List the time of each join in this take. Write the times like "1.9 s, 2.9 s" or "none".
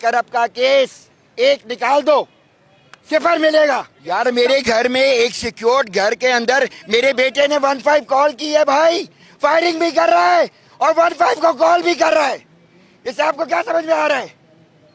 3.9 s